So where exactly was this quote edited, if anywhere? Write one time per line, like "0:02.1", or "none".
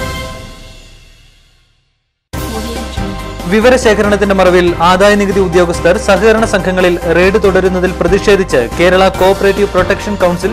0:01.9